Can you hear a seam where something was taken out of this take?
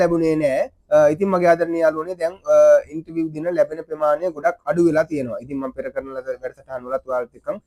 no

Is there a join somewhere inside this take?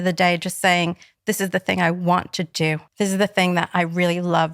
yes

